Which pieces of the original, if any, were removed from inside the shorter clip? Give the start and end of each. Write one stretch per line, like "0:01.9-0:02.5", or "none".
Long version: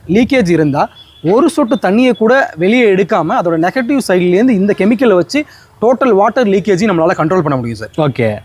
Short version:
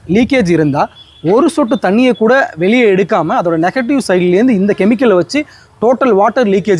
none

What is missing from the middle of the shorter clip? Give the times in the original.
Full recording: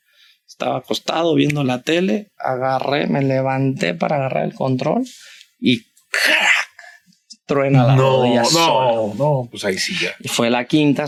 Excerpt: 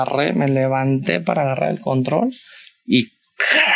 none

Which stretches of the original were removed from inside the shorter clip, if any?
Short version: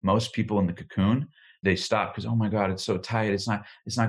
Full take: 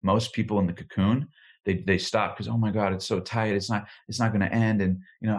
0:01.6-0:01.8

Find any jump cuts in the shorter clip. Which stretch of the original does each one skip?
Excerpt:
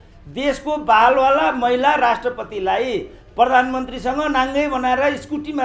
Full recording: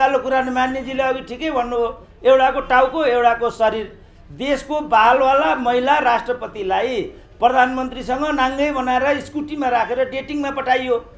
none

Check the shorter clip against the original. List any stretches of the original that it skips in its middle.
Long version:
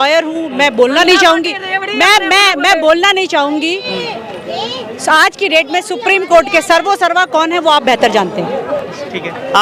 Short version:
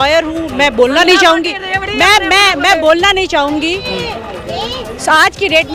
none

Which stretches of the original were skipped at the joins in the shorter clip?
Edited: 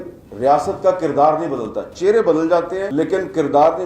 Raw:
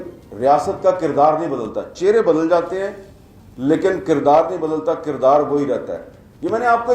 0:02.9-0:03.6

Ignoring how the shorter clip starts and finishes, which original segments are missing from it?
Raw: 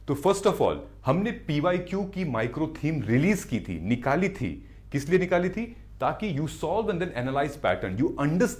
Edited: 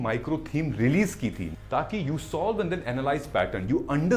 0:03.8-0:05.8

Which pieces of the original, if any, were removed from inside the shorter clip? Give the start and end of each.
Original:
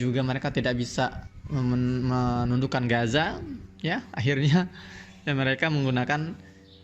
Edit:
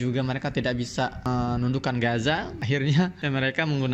0:01.2-0:02.1
0:03.4-0:04.1
0:04.7-0:05.2

